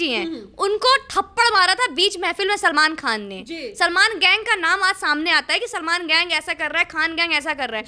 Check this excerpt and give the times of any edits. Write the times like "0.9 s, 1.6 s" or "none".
none